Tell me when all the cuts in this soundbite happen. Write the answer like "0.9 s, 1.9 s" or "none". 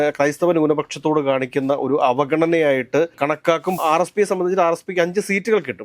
3.8 s